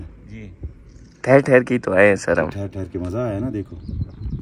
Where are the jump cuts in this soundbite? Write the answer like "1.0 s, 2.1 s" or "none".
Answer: none